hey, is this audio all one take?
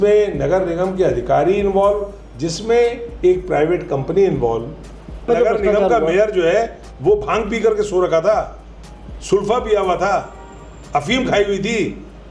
no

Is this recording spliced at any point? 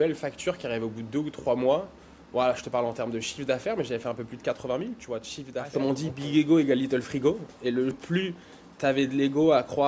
yes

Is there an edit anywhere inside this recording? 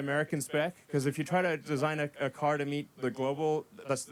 no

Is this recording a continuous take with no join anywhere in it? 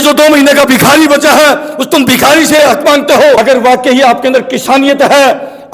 no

